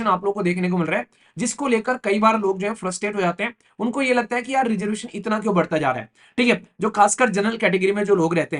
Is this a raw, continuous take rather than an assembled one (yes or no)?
yes